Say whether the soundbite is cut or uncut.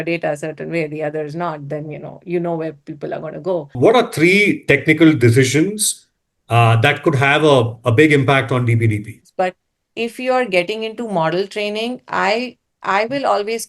cut